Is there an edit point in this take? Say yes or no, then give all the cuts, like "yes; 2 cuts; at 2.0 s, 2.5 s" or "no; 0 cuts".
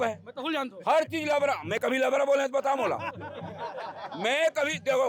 no; 0 cuts